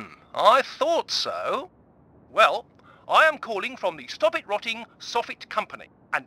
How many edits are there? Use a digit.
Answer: 1